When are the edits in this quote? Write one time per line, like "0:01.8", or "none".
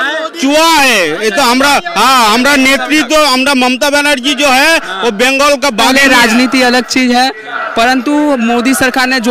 0:05.9